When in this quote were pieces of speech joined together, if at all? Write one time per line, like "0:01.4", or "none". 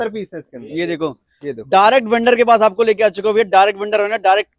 none